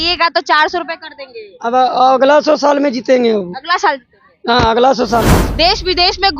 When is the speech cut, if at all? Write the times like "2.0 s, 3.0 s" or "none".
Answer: 5.4 s